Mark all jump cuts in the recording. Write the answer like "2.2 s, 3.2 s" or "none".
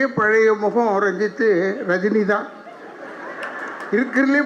none